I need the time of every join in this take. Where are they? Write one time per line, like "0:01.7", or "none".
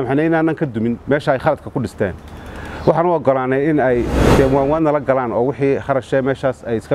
0:04.2